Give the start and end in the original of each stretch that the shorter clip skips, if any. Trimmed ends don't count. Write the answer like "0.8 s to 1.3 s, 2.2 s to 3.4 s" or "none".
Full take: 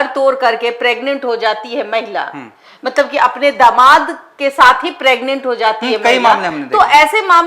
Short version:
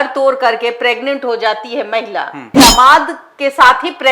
2.6 s to 3.6 s